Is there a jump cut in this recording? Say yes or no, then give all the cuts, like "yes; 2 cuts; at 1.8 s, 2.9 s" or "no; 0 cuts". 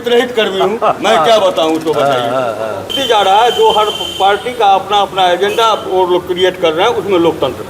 yes; 1 cut; at 2.9 s